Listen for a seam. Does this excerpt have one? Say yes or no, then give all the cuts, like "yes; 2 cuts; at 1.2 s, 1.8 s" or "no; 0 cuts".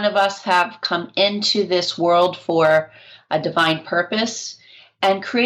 no; 0 cuts